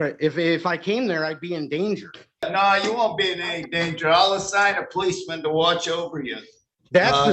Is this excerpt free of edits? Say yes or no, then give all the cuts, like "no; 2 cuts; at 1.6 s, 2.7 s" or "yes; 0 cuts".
no; 1 cut; at 2.4 s